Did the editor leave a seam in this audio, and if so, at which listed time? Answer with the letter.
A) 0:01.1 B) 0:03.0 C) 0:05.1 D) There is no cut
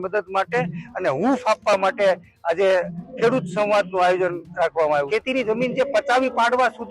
C